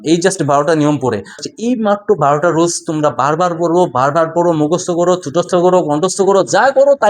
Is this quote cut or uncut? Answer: cut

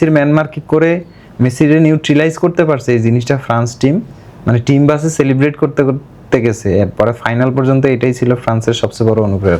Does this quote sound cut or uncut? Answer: uncut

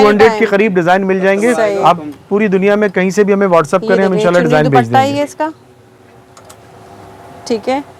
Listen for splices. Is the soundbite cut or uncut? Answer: uncut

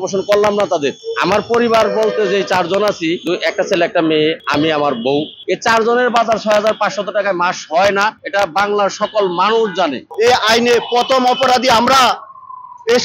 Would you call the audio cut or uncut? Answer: cut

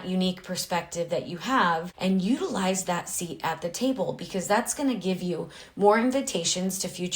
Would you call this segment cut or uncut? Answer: cut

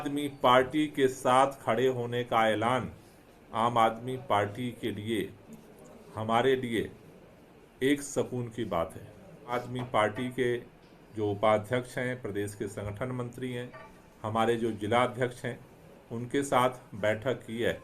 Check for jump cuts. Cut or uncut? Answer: cut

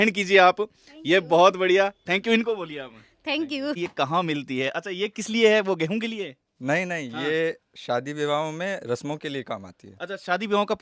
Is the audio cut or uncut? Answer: cut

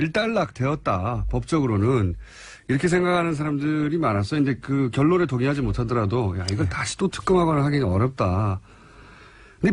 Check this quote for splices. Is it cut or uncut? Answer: cut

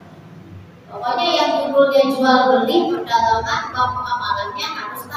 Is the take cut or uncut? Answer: uncut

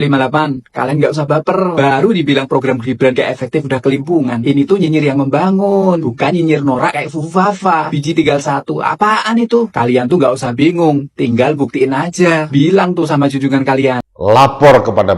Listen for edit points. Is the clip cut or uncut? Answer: cut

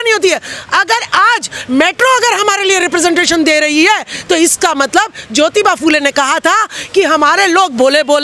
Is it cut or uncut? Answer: uncut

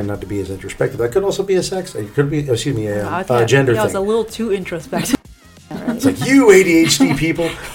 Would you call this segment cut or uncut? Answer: cut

